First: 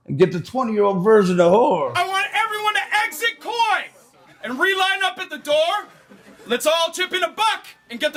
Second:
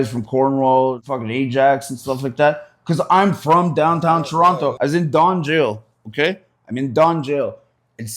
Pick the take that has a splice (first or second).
second